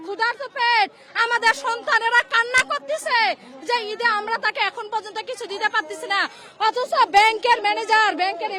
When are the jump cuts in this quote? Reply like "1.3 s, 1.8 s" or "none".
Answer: none